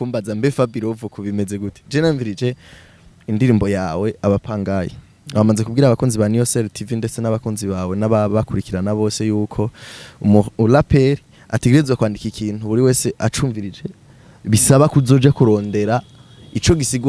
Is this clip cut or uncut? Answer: uncut